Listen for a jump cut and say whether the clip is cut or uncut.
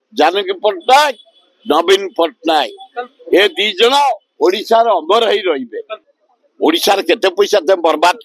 cut